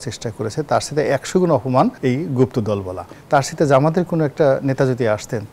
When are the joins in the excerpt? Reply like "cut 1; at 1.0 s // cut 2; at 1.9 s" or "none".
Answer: cut 1; at 3.1 s